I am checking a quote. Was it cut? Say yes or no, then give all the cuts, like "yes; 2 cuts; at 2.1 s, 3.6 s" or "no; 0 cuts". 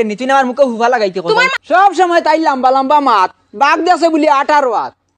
yes; 1 cut; at 1.5 s